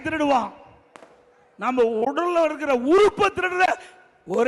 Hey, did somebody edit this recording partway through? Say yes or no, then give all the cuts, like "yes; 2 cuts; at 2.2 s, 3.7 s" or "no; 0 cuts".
no; 0 cuts